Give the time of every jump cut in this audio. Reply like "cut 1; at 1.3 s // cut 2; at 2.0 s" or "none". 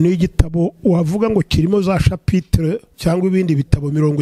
cut 1; at 2.9 s